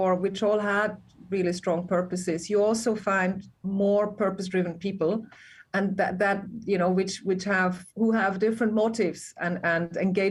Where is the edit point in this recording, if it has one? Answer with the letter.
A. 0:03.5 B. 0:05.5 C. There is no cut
C